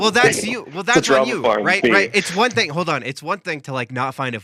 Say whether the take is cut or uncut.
uncut